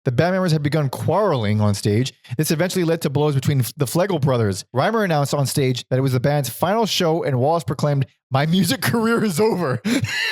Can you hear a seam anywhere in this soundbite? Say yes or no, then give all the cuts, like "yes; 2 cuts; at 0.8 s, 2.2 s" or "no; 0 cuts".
yes; 2 cuts; at 4.6 s, 5.8 s